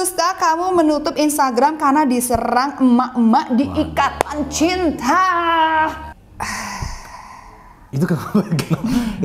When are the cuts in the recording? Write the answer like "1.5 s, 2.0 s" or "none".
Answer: 6.2 s